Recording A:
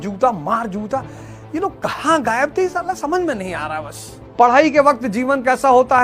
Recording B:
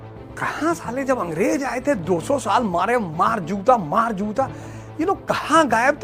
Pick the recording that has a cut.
A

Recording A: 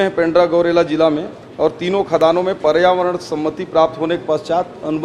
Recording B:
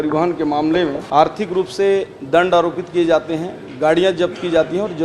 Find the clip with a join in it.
B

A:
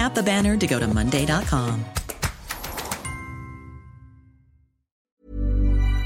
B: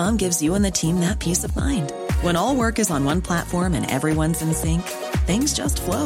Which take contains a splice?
A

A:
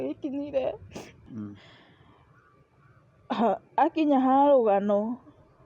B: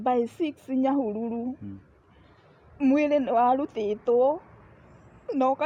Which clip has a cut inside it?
A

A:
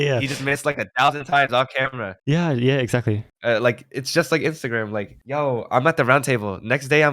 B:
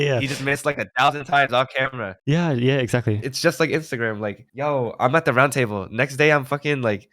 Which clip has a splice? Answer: B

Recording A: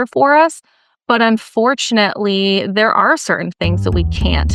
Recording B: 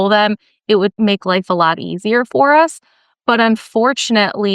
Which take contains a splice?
B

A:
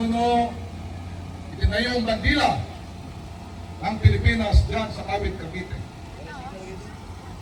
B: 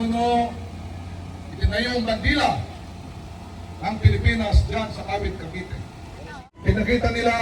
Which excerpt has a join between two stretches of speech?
B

